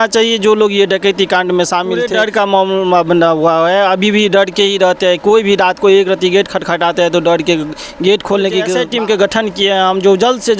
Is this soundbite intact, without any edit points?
no; 2 cuts; at 2.4 s, 8.8 s

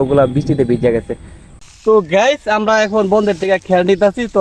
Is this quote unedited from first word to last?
no; 1 cut; at 1.5 s

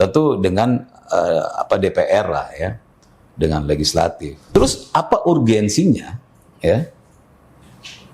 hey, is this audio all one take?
no; 1 cut; at 4.3 s

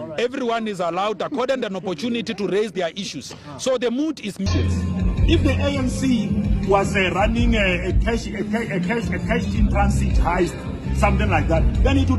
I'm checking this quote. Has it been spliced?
yes; 1 cut; at 4.5 s

